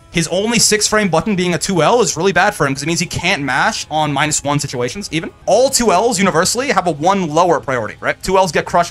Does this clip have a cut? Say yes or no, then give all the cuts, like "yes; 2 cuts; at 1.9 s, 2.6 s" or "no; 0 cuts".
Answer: yes; 1 cut; at 5.3 s